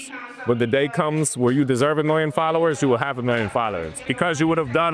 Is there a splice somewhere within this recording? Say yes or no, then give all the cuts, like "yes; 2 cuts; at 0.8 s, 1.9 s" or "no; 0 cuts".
no; 0 cuts